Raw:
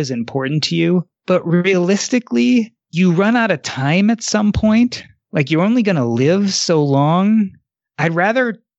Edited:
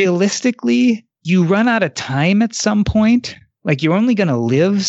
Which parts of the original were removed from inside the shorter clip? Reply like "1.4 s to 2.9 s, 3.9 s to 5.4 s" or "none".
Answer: none